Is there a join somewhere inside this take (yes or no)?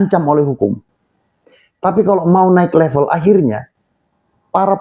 no